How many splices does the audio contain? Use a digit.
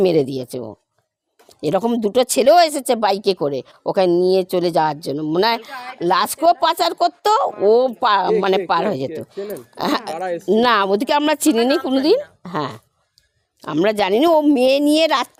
0